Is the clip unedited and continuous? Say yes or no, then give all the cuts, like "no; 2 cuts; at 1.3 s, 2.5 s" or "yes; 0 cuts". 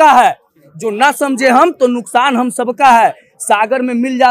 yes; 0 cuts